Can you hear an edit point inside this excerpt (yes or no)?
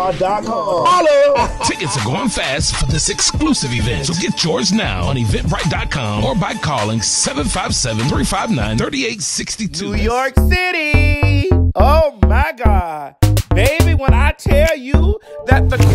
yes